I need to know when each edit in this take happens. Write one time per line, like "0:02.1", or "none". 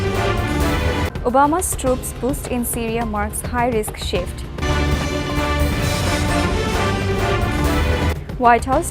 0:00.9